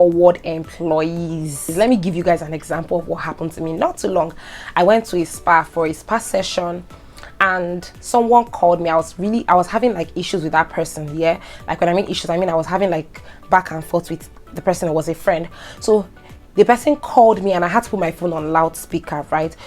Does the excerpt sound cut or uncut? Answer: cut